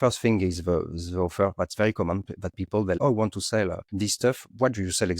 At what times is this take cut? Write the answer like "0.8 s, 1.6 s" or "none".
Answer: 3.0 s, 3.8 s